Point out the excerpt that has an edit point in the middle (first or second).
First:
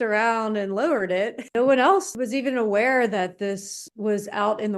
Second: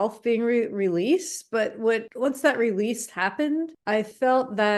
first